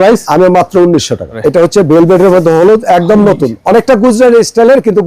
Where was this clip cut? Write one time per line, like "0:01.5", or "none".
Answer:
0:01.4